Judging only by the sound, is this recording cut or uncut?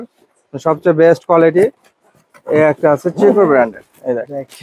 uncut